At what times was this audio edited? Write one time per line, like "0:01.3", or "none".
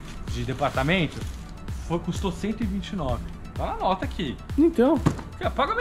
none